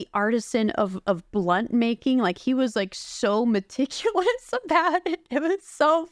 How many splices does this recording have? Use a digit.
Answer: 0